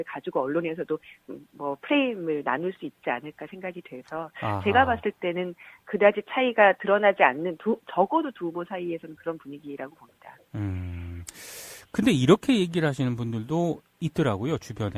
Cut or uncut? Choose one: uncut